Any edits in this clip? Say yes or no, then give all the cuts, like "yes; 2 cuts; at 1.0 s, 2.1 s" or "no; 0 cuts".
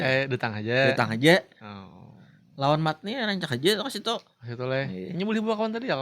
no; 0 cuts